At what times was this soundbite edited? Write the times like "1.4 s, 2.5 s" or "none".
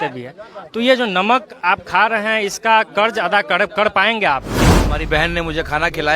4.6 s